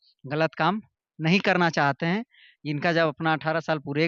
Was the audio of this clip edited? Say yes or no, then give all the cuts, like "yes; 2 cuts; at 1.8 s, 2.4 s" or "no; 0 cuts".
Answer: no; 0 cuts